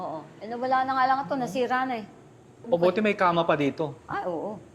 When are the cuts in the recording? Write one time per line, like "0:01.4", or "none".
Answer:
0:02.6